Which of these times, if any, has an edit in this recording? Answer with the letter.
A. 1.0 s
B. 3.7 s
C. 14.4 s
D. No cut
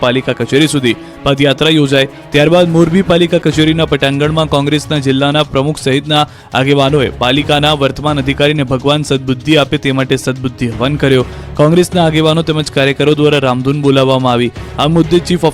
C